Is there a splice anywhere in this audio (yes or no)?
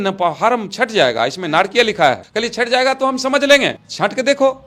no